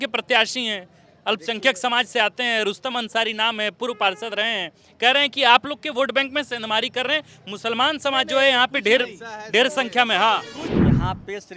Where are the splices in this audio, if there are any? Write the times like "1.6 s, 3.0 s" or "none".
none